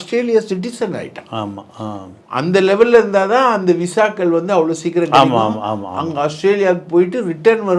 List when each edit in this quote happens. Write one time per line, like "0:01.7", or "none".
none